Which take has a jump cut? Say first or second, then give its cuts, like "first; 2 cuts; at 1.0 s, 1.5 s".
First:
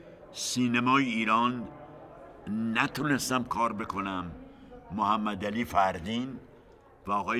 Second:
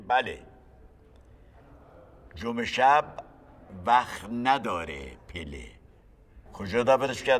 second; 1 cut; at 6.4 s